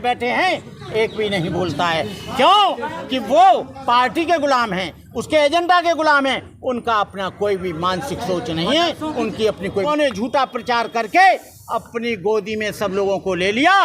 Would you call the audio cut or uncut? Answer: cut